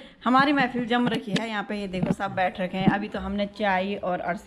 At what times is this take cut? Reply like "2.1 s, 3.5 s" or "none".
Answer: none